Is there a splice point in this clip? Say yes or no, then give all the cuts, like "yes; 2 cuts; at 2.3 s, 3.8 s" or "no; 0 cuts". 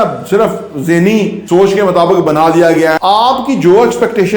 yes; 2 cuts; at 1.4 s, 3.0 s